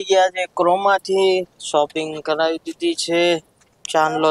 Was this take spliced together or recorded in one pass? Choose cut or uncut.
uncut